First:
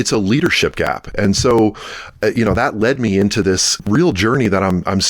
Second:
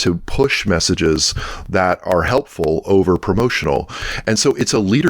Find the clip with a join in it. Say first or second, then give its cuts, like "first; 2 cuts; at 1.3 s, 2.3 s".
first; 1 cut; at 3.7 s